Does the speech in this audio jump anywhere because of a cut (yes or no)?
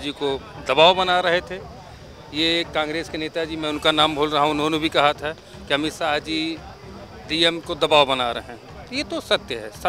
no